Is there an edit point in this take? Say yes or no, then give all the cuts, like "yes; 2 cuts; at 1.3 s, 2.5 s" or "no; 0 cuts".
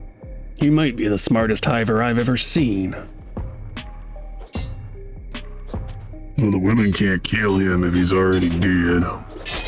no; 0 cuts